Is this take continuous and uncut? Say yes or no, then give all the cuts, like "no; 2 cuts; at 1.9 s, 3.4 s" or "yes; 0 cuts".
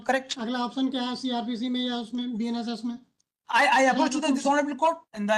yes; 0 cuts